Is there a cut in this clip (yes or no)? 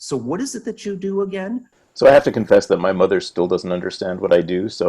yes